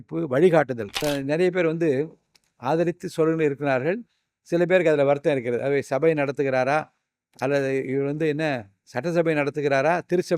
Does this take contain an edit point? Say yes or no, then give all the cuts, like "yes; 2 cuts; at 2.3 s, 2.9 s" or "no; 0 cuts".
yes; 1 cut; at 1.0 s